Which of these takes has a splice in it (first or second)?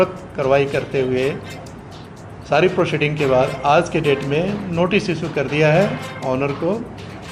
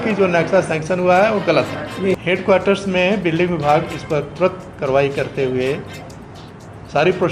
second